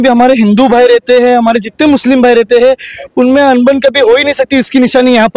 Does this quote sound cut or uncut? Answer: uncut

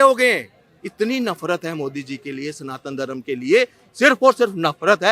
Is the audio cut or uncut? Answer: uncut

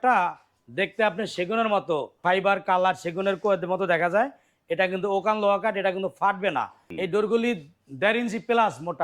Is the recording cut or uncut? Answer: cut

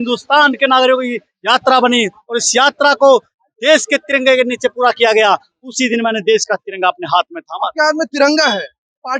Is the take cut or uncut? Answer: uncut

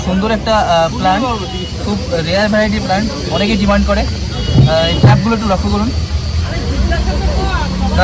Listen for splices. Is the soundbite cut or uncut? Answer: uncut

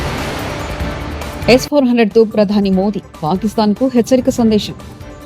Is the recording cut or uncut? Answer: cut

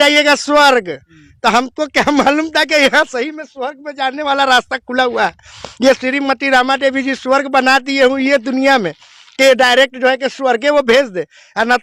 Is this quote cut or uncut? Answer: uncut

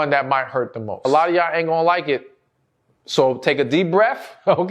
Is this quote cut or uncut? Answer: cut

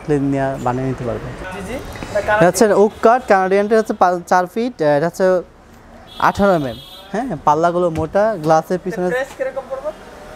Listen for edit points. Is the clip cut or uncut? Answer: cut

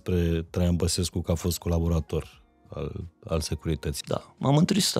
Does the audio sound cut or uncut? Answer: cut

